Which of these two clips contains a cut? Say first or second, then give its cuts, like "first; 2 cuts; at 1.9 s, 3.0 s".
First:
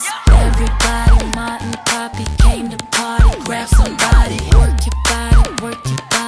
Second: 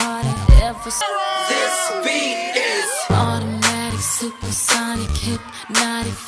second; 1 cut; at 1.0 s